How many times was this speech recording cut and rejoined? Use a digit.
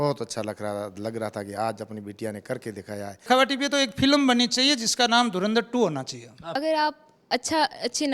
2